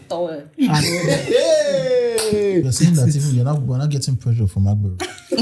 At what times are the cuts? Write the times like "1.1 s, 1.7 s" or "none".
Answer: 2.7 s